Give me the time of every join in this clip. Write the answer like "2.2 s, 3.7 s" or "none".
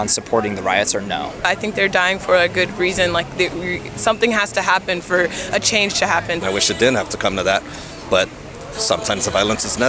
1.5 s, 6.4 s